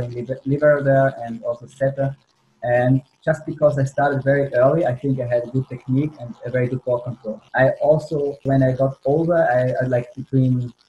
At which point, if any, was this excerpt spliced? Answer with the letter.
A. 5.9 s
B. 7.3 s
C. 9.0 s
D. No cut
B